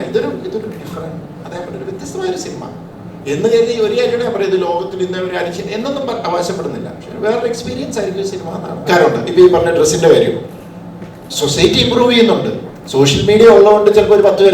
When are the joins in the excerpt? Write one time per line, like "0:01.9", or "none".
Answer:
0:08.9